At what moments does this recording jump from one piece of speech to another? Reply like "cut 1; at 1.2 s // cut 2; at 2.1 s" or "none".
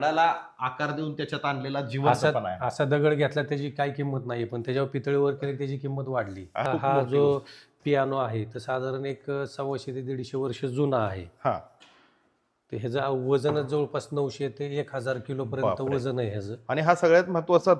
cut 1; at 6.6 s